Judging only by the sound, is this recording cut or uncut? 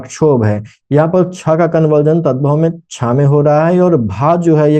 uncut